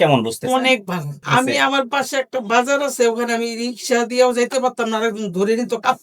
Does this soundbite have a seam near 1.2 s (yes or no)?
yes